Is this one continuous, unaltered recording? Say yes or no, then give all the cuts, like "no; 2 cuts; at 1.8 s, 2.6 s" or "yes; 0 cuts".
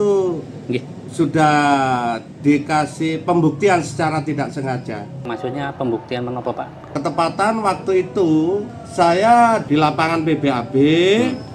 no; 4 cuts; at 5.3 s, 6.9 s, 8.7 s, 9.6 s